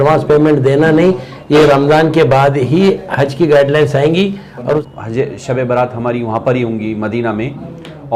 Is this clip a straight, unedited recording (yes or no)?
no